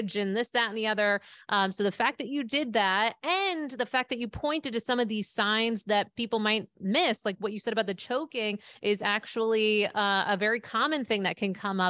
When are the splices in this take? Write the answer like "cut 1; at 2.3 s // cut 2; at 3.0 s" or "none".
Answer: none

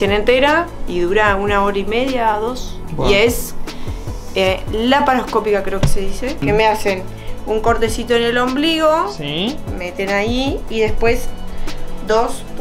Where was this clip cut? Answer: none

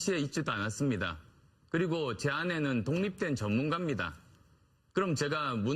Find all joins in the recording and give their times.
cut 1; at 4.0 s

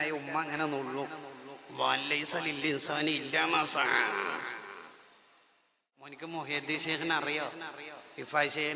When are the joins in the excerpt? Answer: cut 1; at 6.1 s

